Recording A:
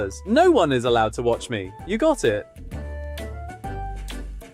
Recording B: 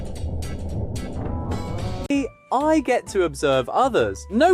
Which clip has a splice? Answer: B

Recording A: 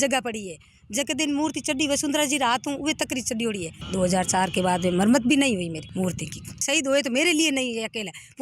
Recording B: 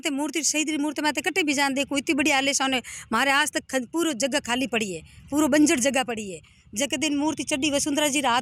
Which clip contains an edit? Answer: A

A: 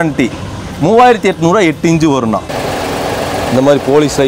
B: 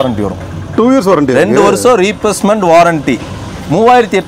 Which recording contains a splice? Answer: A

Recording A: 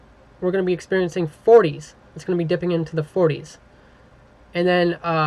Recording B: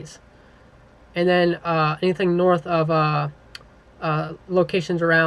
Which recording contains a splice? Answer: B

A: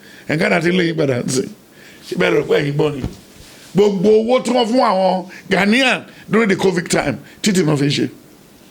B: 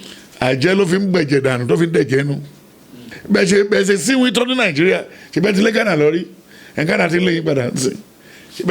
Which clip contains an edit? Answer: B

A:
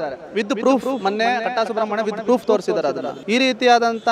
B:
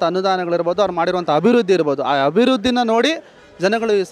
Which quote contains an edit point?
A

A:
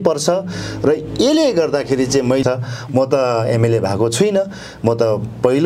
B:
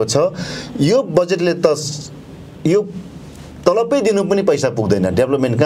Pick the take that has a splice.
A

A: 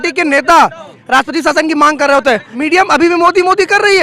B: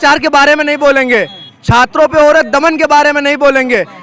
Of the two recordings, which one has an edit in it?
A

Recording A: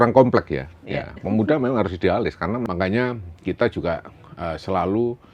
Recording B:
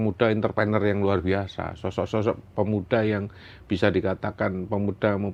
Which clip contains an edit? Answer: A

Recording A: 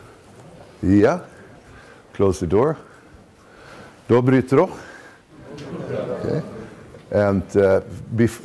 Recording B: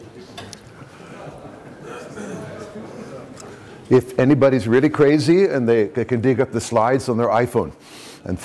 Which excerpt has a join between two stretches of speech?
A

